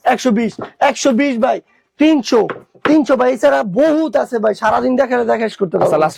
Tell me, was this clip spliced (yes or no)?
no